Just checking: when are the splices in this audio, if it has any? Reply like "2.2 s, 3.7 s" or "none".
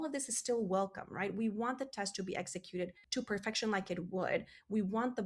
3.0 s